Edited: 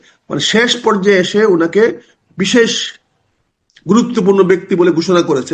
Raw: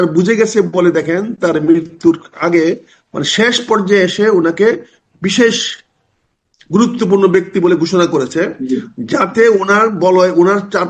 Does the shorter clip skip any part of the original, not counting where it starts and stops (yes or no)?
no